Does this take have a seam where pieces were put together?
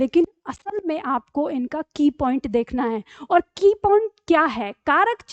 no; 0 cuts

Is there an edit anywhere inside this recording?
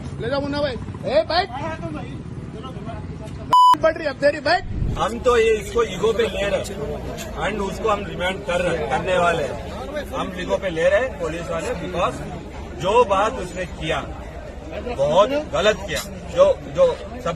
yes; 1 cut; at 4.8 s

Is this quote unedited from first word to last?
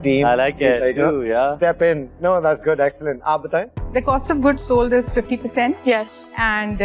yes; 0 cuts

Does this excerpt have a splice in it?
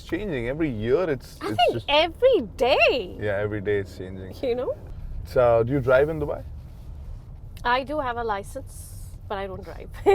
no; 0 cuts

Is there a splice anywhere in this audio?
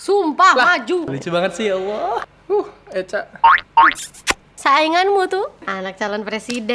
yes; 4 cuts; at 1.0 s, 2.2 s, 4.6 s, 5.7 s

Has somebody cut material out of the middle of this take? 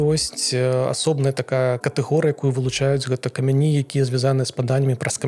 no; 0 cuts

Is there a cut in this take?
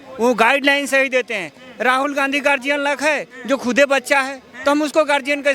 no; 0 cuts

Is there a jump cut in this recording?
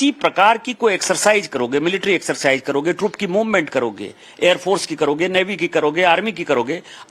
yes; 1 cut; at 3.7 s

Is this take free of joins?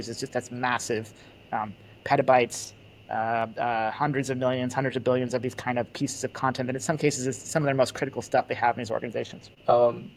yes; 0 cuts

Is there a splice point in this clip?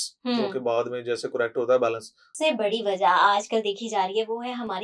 yes; 1 cut; at 2.3 s

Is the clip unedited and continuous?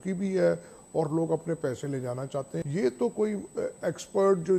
no; 1 cut; at 2.6 s

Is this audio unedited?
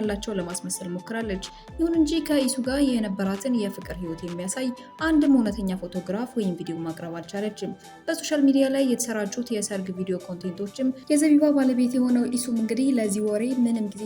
no; 1 cut; at 11.0 s

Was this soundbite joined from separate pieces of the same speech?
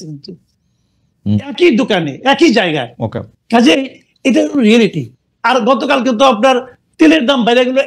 no; 0 cuts

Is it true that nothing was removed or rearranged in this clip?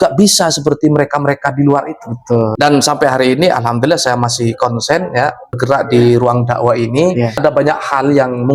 no; 3 cuts; at 2.5 s, 5.6 s, 7.4 s

